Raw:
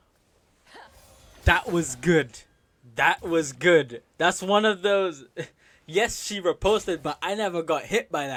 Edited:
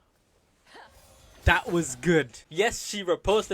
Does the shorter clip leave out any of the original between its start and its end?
yes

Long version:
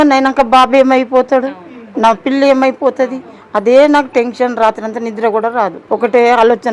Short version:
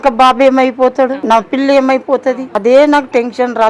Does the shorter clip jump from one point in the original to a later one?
yes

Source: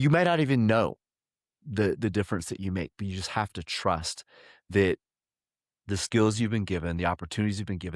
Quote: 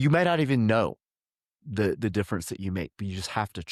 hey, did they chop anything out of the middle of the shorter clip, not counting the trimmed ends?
no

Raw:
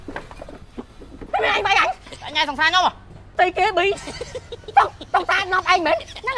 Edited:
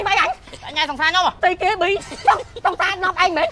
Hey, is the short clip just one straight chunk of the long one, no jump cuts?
no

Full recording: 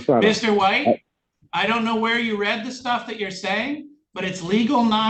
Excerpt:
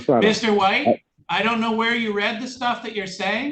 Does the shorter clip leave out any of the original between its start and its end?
yes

